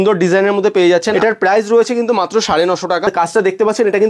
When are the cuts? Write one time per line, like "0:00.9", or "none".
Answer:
0:01.1
0:03.1